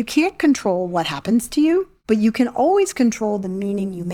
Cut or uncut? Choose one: cut